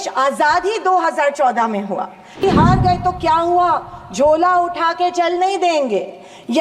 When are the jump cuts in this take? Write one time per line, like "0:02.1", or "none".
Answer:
0:02.4